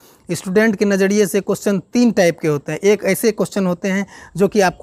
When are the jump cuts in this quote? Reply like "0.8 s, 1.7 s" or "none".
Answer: none